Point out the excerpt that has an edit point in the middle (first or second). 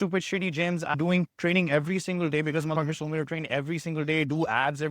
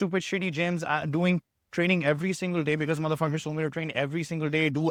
first